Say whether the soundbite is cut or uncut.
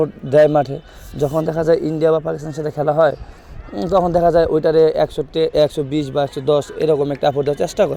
uncut